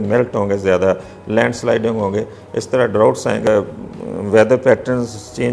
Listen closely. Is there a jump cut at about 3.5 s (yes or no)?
yes